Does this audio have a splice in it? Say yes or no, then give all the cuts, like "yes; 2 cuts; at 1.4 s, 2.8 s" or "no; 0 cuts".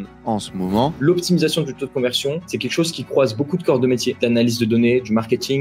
yes; 3 cuts; at 1.0 s, 2.5 s, 4.2 s